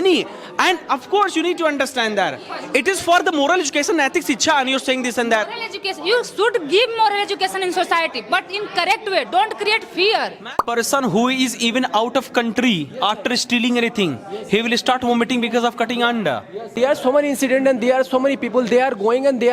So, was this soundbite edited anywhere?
yes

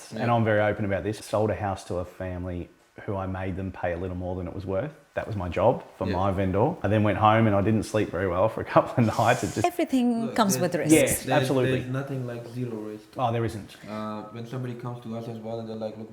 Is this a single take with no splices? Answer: no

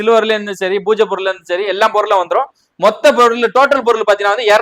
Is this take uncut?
yes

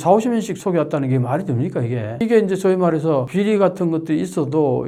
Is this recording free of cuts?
yes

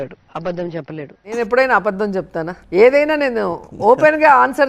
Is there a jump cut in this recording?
yes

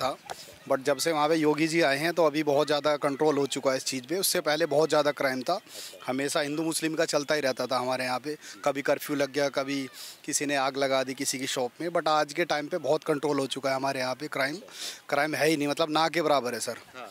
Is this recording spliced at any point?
no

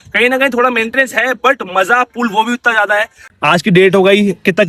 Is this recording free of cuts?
no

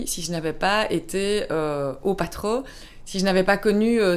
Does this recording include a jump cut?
no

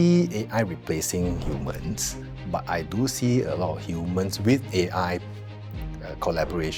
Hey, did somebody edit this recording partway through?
no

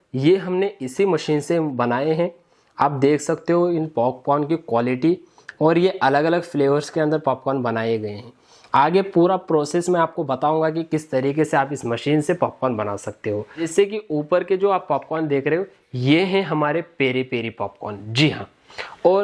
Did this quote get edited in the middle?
yes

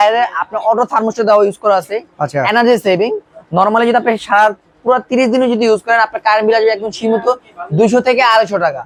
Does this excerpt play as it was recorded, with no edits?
yes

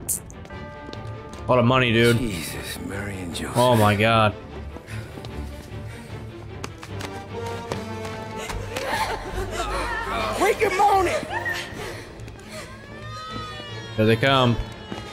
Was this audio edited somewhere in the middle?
no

